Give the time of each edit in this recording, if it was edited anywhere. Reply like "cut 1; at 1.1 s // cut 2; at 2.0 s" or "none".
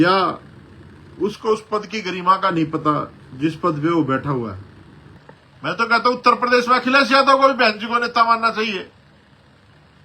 cut 1; at 5.1 s